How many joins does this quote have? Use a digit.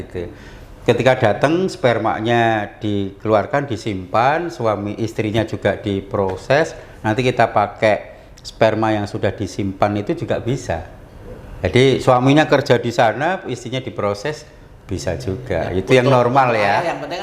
0